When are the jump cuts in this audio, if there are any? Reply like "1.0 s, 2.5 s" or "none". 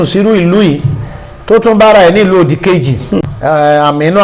3.3 s